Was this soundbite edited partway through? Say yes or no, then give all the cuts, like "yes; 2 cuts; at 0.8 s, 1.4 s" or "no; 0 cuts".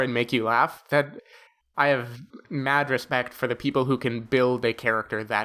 no; 0 cuts